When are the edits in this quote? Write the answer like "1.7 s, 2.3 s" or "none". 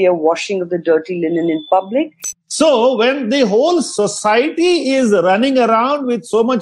2.4 s